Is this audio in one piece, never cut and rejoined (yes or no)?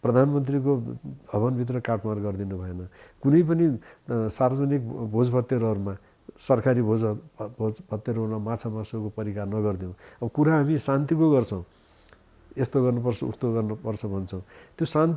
yes